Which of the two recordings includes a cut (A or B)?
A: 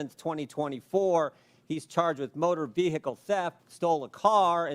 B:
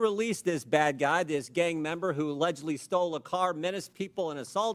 A